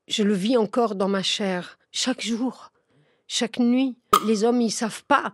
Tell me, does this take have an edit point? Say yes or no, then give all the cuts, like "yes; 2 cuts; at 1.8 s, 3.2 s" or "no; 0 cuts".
yes; 1 cut; at 4.2 s